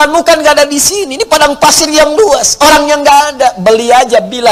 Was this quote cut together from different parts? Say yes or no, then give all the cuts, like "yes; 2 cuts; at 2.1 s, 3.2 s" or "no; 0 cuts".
no; 0 cuts